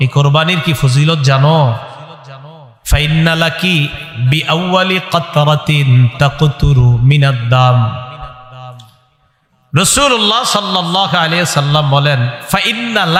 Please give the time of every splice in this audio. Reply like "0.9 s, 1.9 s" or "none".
none